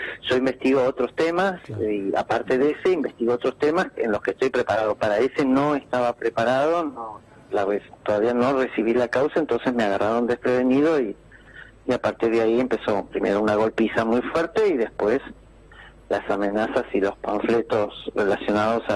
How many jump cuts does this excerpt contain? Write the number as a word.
one